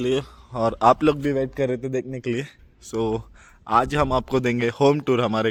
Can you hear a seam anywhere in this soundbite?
no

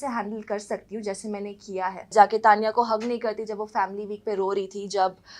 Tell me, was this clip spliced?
yes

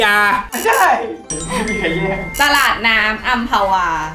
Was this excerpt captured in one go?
yes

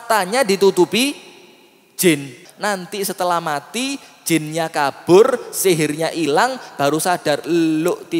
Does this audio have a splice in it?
yes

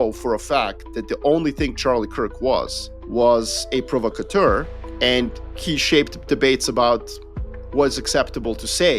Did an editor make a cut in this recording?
no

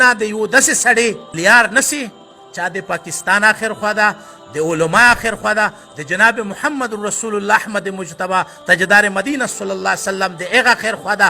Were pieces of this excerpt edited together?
yes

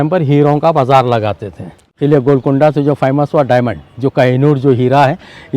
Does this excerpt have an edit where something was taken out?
yes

